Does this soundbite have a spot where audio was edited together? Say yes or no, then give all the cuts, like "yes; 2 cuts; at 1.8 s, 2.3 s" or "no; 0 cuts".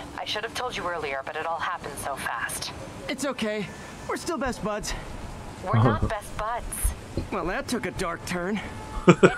no; 0 cuts